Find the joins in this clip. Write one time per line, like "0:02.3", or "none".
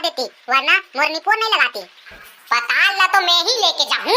0:02.2